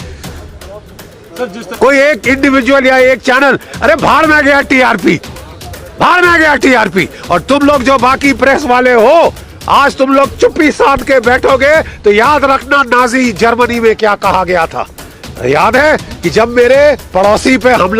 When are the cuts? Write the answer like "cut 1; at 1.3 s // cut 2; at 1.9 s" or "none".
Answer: cut 1; at 1.6 s